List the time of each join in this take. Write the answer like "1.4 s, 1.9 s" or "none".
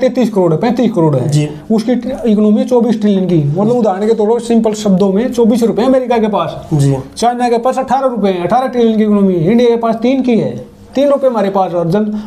none